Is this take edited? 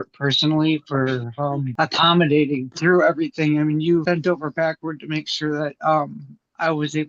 yes; 3 cuts; at 1.7 s, 2.7 s, 4.0 s

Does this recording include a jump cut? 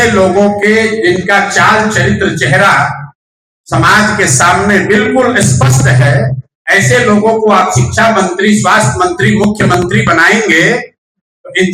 no; 0 cuts

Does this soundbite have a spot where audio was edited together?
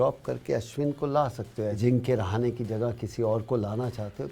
yes; 1 cut; at 1.8 s

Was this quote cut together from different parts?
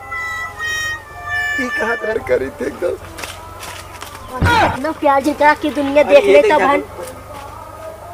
yes; 1 cut; at 2.1 s

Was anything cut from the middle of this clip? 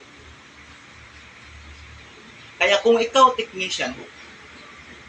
no; 0 cuts

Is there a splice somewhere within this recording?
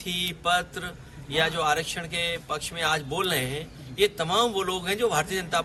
no; 0 cuts

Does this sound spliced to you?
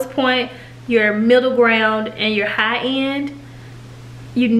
no; 0 cuts

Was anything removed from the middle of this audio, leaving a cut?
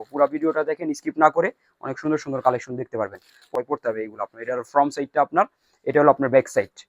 yes; 1 cut; at 3.5 s

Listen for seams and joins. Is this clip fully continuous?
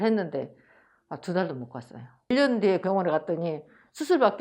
no; 1 cut; at 2.2 s

